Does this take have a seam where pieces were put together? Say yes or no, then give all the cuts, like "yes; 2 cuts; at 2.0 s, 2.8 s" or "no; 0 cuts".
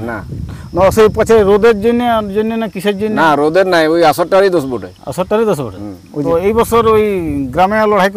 yes; 1 cut; at 6.1 s